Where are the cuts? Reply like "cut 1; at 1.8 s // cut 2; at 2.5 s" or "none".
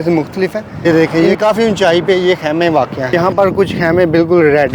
cut 1; at 0.9 s // cut 2; at 3.0 s